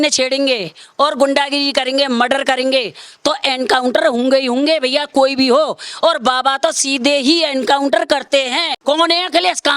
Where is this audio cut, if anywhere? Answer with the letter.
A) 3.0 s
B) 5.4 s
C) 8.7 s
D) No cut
C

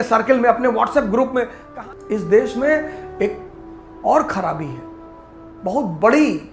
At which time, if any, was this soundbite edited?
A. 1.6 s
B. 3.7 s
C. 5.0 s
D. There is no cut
A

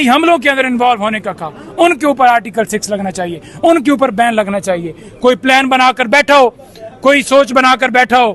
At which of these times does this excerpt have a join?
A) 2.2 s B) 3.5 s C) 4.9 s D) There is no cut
D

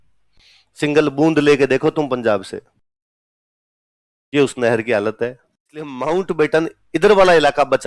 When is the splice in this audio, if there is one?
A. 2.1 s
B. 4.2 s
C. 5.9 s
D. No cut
C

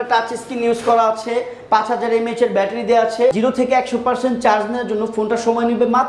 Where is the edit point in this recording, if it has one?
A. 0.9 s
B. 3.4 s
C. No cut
B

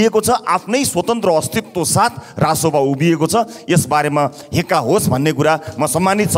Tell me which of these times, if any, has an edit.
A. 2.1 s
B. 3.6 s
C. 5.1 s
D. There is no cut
D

